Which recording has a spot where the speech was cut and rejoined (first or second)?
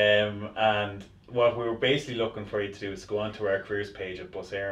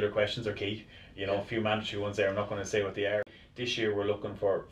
second